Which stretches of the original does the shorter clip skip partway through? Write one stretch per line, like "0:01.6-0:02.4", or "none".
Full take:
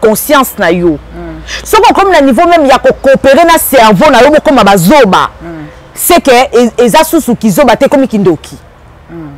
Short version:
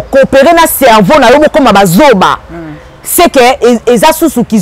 none